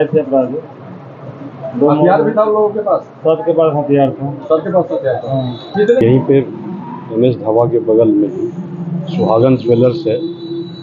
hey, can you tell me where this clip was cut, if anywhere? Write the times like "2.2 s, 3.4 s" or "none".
6.0 s